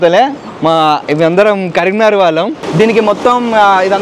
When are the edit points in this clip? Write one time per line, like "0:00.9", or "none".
0:02.6

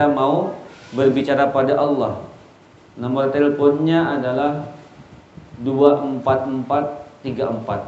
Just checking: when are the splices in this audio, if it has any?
none

